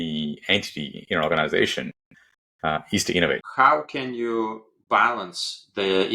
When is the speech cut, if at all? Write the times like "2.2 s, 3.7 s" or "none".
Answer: 3.5 s